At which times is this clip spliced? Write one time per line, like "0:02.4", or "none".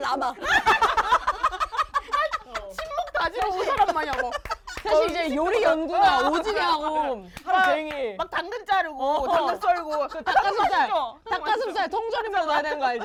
none